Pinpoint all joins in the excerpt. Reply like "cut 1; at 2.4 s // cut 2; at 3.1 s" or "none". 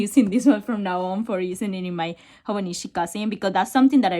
none